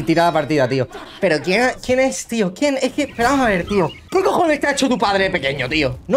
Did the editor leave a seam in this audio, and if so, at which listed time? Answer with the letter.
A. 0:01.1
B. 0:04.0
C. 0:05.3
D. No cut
B